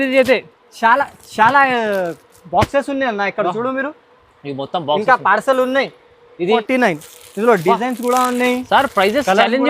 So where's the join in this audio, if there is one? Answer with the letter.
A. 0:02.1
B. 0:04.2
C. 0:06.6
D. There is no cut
C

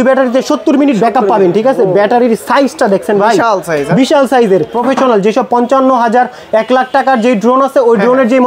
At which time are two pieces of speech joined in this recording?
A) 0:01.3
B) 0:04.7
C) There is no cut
B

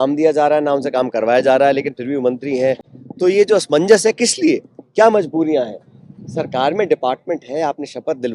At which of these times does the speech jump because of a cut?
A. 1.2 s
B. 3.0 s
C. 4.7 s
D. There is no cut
D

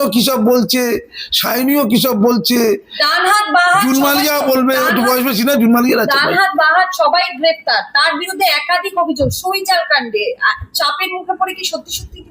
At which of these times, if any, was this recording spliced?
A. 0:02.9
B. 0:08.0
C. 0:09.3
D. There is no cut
D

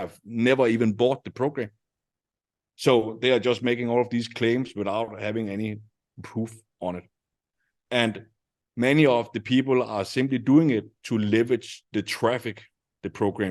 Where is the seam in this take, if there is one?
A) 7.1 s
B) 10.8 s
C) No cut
A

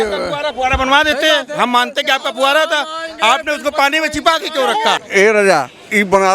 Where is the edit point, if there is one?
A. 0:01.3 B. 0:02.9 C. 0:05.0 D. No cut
C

